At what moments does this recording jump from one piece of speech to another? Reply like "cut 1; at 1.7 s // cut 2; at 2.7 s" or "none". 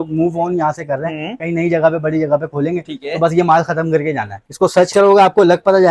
cut 1; at 4.4 s